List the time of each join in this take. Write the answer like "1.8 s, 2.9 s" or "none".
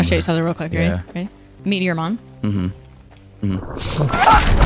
1.6 s